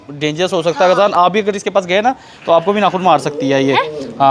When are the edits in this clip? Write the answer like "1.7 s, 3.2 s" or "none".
none